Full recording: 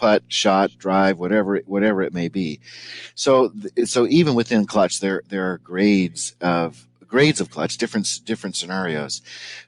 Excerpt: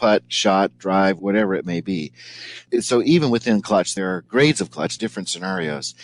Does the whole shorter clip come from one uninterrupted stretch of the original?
no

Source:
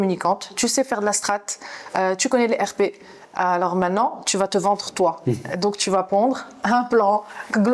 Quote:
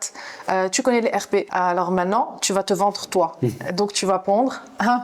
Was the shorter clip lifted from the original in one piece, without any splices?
no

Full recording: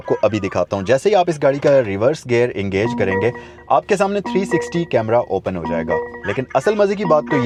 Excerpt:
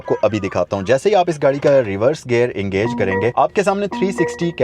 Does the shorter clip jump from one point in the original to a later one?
yes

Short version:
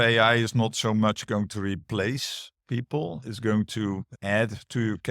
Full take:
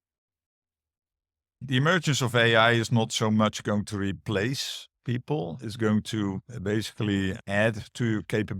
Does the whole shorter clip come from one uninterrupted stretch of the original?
no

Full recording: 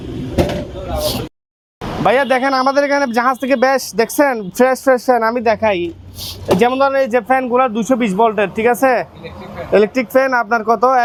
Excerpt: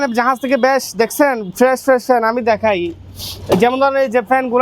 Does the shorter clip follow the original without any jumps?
yes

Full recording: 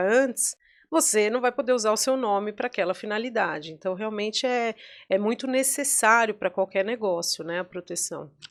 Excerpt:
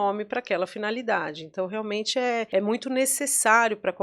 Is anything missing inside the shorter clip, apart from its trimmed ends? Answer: yes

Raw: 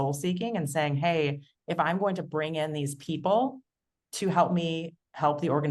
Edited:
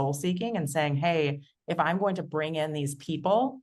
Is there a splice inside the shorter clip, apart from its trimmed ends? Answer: no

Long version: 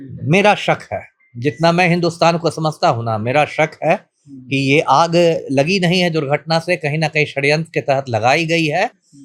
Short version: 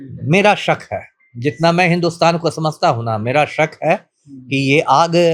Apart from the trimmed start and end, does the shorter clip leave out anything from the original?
no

